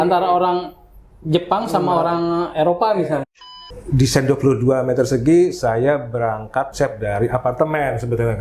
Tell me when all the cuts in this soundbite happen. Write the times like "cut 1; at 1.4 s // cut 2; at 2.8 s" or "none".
cut 1; at 3.3 s // cut 2; at 6.7 s

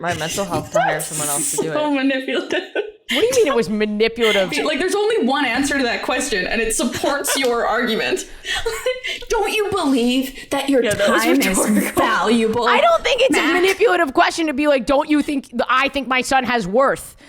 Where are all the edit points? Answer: cut 1; at 3.0 s // cut 2; at 4.5 s

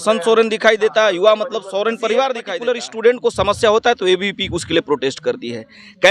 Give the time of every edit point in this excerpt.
cut 1; at 2.5 s

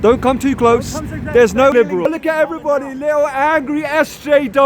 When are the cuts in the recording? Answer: cut 1; at 1.7 s

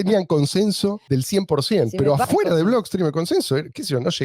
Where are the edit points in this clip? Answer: cut 1; at 1.0 s // cut 2; at 2.2 s

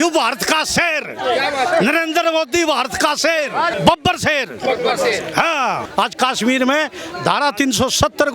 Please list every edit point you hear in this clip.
cut 1; at 3.7 s // cut 2; at 5.8 s

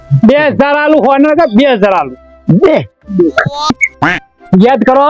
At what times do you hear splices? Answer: cut 1; at 3.8 s

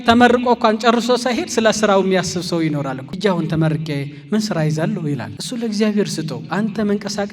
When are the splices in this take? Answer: cut 1; at 3.0 s // cut 2; at 5.4 s

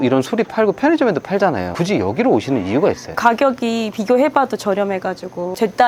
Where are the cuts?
none

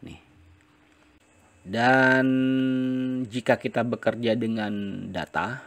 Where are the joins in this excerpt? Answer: cut 1; at 1.2 s

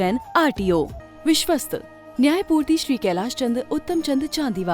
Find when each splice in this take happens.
cut 1; at 1.0 s

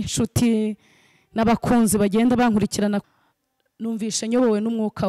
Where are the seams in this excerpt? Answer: cut 1; at 3.1 s

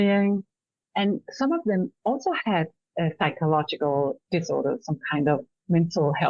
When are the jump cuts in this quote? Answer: none

